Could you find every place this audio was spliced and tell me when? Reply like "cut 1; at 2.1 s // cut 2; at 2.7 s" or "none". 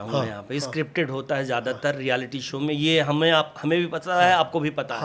none